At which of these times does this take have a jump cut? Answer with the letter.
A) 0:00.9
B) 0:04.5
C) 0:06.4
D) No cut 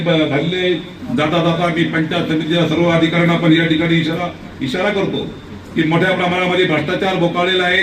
A